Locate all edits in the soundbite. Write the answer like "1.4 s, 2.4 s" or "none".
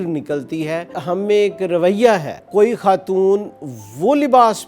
1.0 s, 2.4 s